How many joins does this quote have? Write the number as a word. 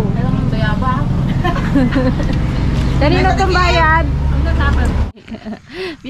one